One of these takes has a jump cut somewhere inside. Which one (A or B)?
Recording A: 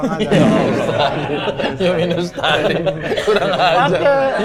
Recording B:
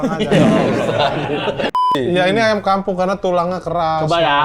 B